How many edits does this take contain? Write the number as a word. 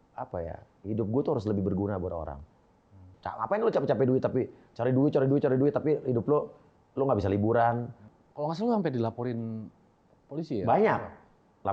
two